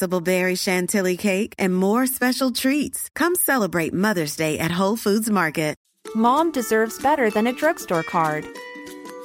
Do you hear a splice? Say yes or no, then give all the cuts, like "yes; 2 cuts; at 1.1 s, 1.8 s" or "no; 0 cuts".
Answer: yes; 1 cut; at 5.9 s